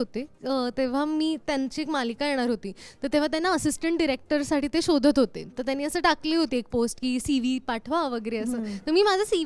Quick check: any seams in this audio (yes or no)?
no